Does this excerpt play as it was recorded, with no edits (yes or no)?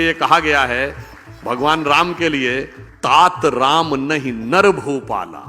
no